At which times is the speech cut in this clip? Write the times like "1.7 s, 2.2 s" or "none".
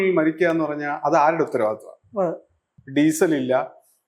2.6 s